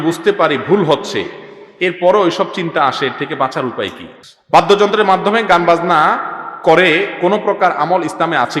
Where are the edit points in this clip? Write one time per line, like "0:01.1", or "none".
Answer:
0:04.1